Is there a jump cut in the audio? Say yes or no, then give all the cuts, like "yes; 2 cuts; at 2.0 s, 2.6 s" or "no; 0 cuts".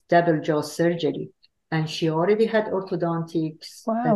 no; 0 cuts